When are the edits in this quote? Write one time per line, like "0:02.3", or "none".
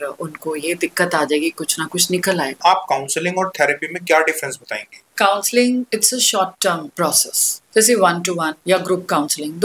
0:02.6
0:05.1
0:05.9
0:07.0
0:08.5